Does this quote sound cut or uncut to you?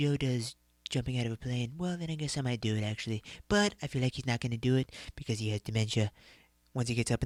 uncut